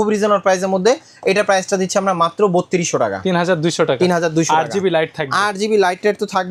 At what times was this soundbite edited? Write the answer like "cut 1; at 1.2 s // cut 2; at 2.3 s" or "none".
none